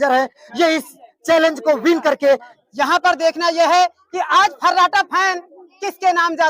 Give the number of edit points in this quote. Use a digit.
1